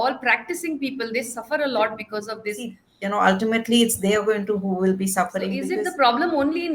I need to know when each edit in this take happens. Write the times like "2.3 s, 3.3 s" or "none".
2.9 s, 5.6 s